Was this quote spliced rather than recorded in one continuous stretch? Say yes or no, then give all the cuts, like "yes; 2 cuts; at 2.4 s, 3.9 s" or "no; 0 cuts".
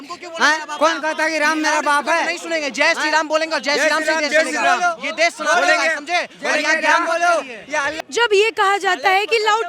no; 0 cuts